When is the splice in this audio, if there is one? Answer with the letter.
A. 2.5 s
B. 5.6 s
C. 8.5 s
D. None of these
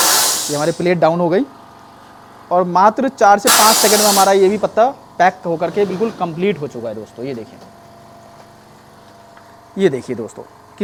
D